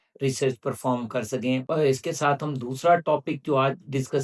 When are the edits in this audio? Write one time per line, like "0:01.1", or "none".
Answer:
0:01.6

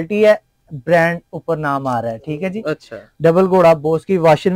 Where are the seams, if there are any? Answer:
none

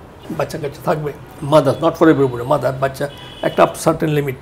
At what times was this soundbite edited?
0:01.3

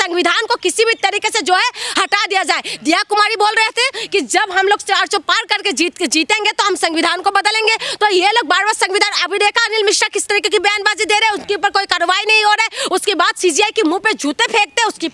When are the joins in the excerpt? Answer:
none

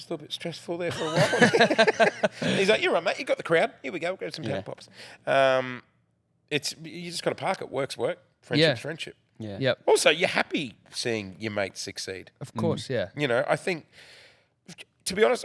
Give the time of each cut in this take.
none

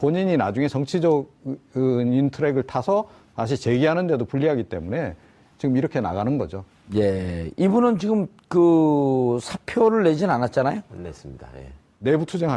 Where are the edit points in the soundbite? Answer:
0:07.2

